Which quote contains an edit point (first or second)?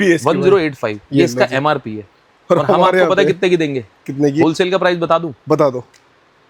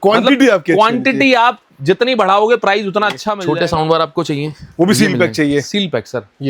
second